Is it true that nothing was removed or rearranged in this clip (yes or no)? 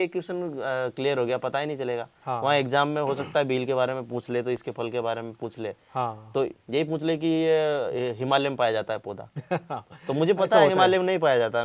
yes